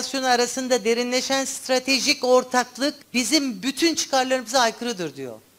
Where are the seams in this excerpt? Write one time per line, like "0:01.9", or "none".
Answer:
none